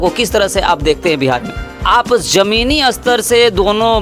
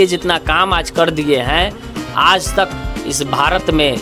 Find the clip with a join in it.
first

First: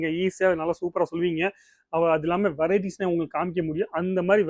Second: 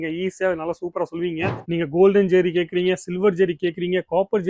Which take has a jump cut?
second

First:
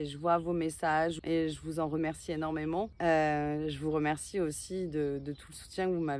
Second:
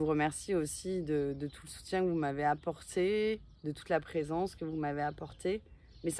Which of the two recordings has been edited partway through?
first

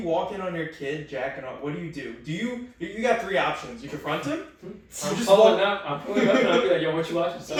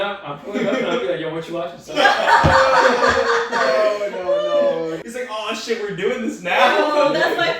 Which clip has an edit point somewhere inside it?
second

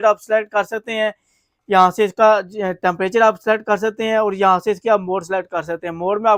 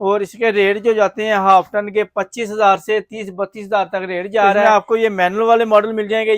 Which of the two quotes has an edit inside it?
second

